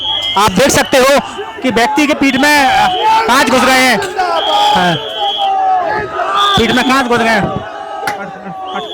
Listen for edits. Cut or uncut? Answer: uncut